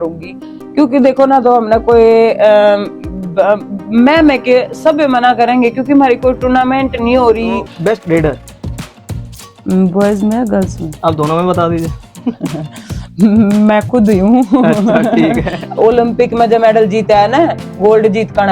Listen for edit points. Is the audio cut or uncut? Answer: cut